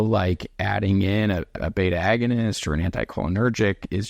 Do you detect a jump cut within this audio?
yes; 1 cut; at 1.5 s

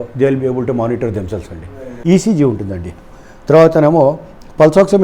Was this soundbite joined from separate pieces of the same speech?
yes; 1 cut; at 1.9 s

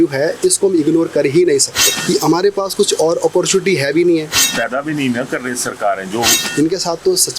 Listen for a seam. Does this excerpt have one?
yes; 3 cuts; at 1.9 s, 4.4 s, 6.4 s

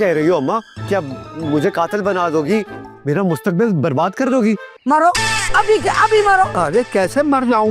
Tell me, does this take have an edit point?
yes; 1 cut; at 4.7 s

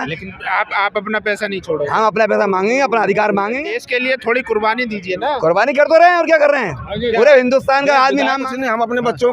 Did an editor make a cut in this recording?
yes; 2 cuts; at 3.7 s, 8.4 s

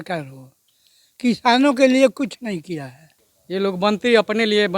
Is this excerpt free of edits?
no; 1 cut; at 3.2 s

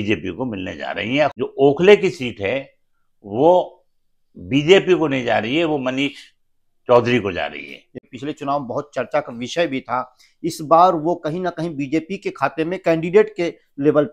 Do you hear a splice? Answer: yes; 2 cuts; at 1.3 s, 7.9 s

